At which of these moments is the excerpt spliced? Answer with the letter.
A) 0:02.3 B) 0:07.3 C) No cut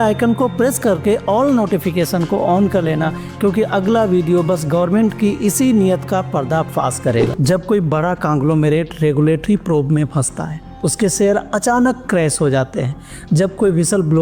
B